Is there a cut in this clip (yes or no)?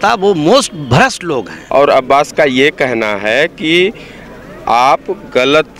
yes